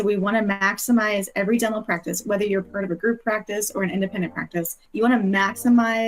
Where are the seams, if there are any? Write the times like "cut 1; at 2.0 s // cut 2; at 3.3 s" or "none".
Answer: cut 1; at 4.8 s